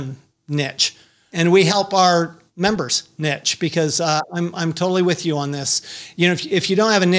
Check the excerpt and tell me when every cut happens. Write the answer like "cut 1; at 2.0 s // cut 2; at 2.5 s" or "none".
cut 1; at 1.3 s // cut 2; at 2.4 s